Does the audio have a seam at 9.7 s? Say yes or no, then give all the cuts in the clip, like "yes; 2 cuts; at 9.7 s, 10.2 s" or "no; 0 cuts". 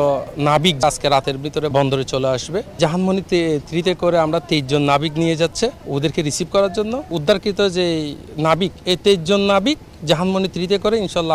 no; 5 cuts; at 0.8 s, 1.7 s, 2.8 s, 5.8 s, 7.1 s